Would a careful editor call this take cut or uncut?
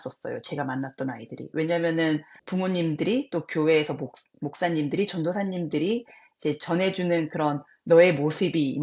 cut